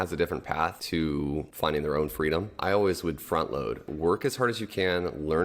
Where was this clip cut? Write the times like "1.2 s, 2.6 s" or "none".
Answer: 1.3 s, 2.5 s, 3.9 s